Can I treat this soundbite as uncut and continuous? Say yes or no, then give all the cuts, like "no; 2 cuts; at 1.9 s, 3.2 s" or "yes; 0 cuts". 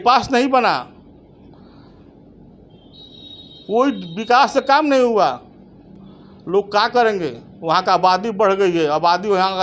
yes; 0 cuts